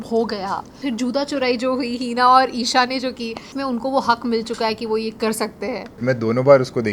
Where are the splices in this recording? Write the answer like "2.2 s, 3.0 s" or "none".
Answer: 0.8 s, 3.5 s, 6.0 s